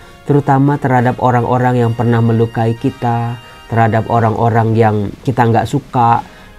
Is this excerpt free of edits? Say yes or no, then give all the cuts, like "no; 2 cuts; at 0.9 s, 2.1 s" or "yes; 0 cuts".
no; 1 cut; at 5.2 s